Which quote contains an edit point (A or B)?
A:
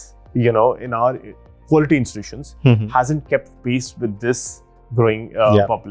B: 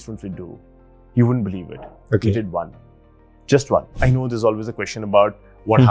B